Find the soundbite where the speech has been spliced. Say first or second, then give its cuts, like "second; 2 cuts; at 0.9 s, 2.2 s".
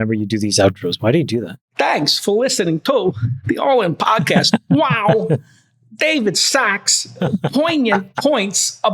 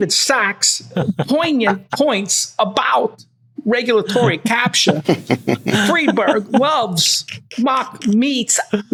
first; 1 cut; at 1.6 s